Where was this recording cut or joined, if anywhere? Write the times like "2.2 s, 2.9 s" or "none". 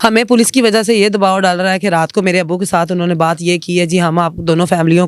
none